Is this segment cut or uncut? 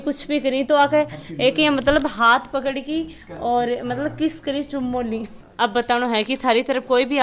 uncut